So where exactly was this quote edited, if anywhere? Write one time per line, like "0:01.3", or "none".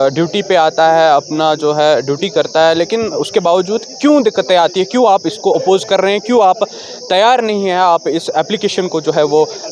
none